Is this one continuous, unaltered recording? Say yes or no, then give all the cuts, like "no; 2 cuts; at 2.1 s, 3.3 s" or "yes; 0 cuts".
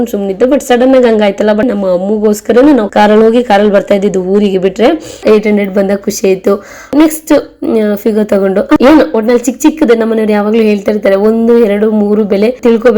no; 5 cuts; at 1.6 s, 2.9 s, 5.2 s, 6.9 s, 8.8 s